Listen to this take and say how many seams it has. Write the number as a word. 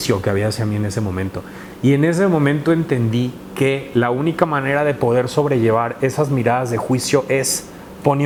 zero